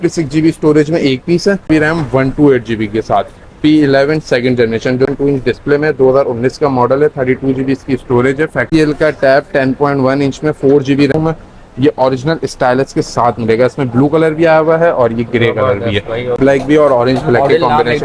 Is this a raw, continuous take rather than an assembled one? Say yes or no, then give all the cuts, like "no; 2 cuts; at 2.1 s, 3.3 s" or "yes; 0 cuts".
no; 5 cuts; at 1.7 s, 5.1 s, 8.6 s, 11.1 s, 16.4 s